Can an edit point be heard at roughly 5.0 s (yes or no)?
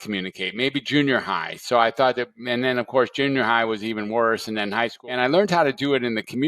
yes